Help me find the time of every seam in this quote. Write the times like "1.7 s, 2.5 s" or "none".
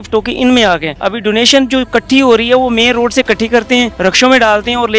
0.9 s, 3.9 s